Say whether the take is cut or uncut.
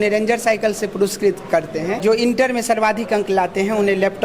cut